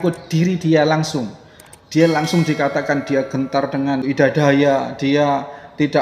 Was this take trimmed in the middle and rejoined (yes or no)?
yes